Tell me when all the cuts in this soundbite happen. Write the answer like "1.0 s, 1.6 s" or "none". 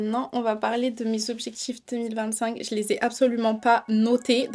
none